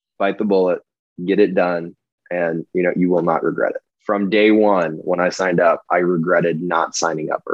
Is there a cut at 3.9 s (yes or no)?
yes